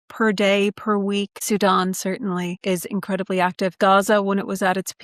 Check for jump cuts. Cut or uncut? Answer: cut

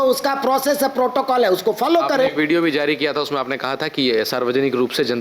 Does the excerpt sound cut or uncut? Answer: uncut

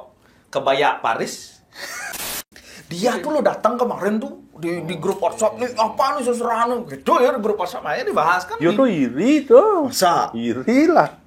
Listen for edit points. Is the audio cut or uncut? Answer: cut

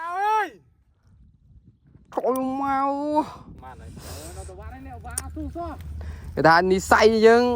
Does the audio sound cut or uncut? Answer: cut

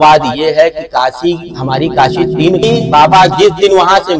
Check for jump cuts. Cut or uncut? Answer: cut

